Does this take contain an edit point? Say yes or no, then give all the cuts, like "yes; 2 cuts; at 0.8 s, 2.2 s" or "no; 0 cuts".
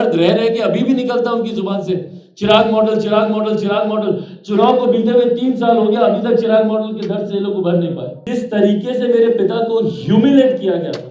yes; 1 cut; at 8.1 s